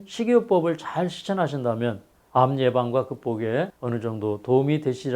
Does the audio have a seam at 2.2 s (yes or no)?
no